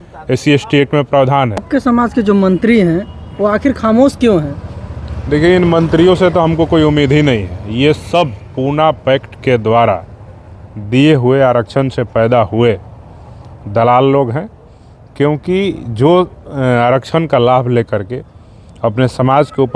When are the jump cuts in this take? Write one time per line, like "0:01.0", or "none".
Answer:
0:01.7